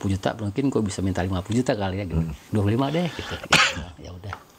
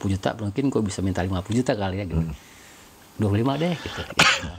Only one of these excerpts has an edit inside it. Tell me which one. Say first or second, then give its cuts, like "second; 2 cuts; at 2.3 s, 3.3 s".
first; 1 cut; at 2.4 s